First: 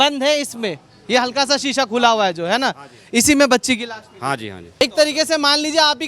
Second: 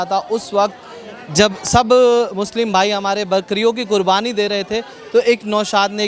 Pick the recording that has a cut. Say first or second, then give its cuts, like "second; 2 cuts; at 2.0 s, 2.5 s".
first; 1 cut; at 4.8 s